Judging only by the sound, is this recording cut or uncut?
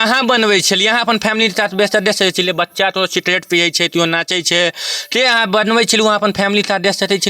uncut